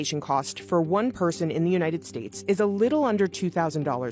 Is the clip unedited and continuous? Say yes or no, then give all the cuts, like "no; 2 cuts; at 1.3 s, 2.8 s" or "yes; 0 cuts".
yes; 0 cuts